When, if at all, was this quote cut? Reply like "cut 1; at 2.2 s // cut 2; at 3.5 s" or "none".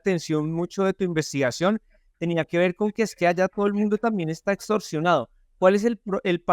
none